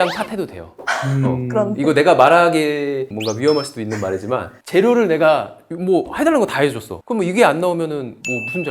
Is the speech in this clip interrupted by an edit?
no; 0 cuts

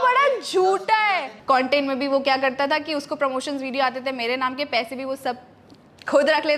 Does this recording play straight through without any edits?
no; 1 cut; at 1.3 s

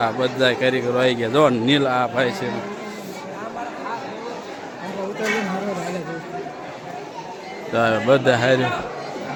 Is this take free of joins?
yes; 0 cuts

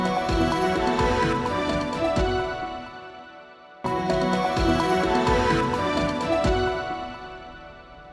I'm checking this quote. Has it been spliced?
yes; 1 cut; at 4.0 s

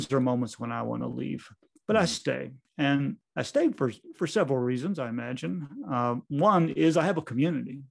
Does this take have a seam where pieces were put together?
yes; 2 cuts; at 2.6 s, 3.2 s

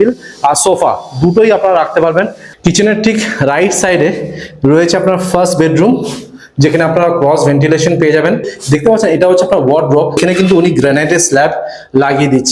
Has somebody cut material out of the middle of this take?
yes; 3 cuts; at 2.4 s, 8.5 s, 10.2 s

